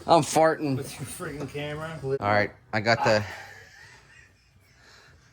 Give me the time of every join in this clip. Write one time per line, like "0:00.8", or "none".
0:02.2